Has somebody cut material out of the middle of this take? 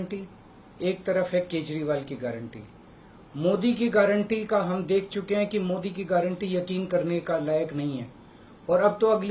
no; 0 cuts

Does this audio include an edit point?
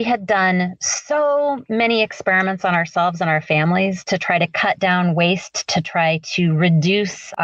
no; 0 cuts

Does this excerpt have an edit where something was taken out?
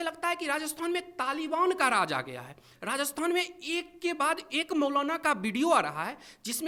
no; 0 cuts

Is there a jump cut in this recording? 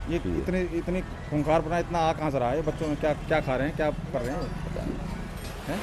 no; 0 cuts

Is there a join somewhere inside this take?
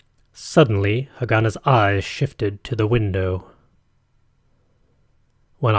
no; 0 cuts

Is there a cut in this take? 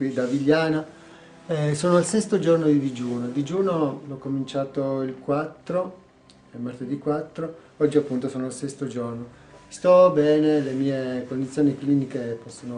no; 0 cuts

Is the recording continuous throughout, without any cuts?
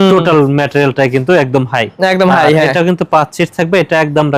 yes; 0 cuts

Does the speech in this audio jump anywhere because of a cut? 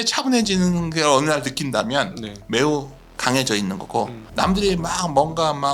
yes; 1 cut; at 4.2 s

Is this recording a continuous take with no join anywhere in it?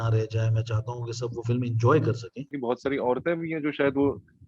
no; 1 cut; at 2.6 s

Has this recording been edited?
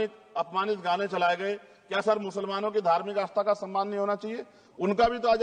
no; 0 cuts

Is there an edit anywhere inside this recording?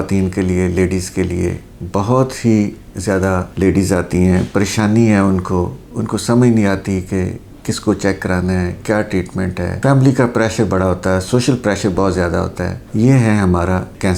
no; 0 cuts

